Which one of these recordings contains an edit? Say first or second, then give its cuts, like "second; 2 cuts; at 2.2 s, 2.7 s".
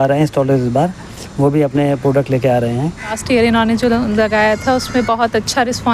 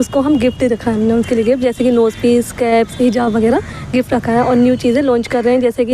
first; 1 cut; at 3.2 s